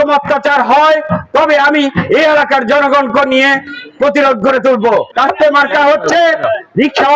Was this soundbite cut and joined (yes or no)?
yes